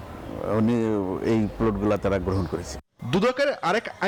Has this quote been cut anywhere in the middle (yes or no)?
no